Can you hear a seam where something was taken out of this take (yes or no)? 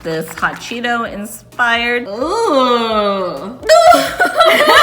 yes